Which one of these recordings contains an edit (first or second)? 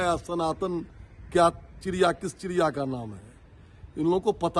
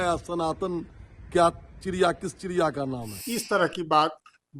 second